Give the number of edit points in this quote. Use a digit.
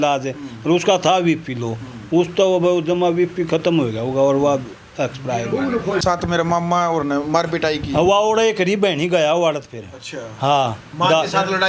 1